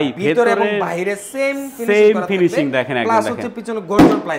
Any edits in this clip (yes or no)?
no